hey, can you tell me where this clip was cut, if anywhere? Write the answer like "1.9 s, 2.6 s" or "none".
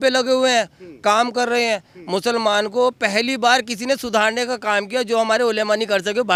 none